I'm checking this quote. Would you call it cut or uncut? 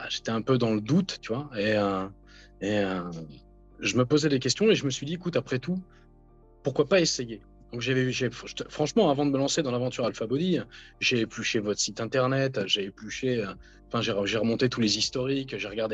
uncut